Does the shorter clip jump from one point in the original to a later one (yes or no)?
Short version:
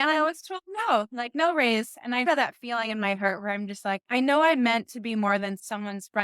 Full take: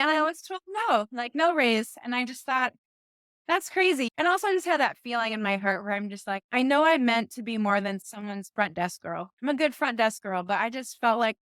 yes